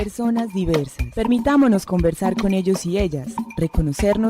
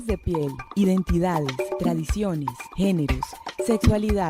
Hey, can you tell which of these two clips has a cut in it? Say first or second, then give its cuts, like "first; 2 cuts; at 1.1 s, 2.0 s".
first; 1 cut; at 1.0 s